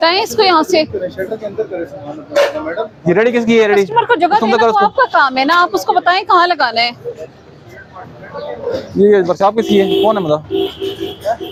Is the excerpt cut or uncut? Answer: uncut